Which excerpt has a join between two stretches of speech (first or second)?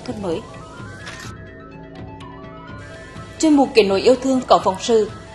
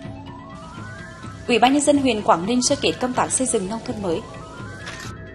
second